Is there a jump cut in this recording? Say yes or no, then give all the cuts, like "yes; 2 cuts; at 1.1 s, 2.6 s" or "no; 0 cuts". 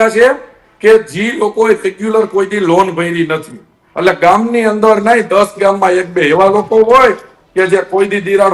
no; 0 cuts